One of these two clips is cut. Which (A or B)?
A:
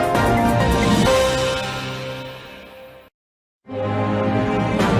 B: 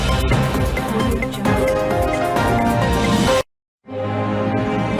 B